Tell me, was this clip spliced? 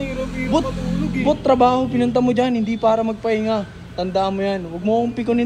no; 0 cuts

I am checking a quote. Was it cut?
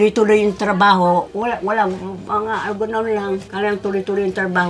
yes; 2 cuts; at 1.3 s, 3.5 s

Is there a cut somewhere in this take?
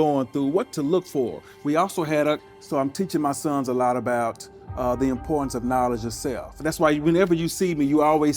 yes; 1 cut; at 2.5 s

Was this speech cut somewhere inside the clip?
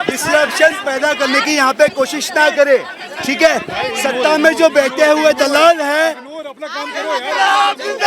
no; 0 cuts

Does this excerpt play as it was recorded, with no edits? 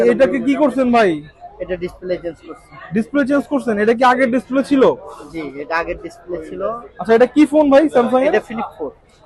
yes; 0 cuts

